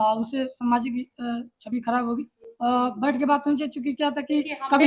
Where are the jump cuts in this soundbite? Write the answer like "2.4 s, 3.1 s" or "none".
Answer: none